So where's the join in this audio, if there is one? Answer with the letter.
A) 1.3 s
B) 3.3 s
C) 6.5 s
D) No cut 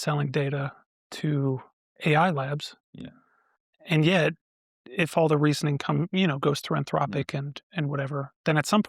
D